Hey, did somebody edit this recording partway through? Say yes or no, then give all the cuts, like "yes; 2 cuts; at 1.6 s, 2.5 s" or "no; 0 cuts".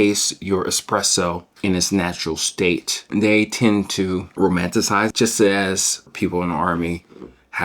yes; 5 cuts; at 1.5 s, 3.0 s, 4.3 s, 5.1 s, 6.1 s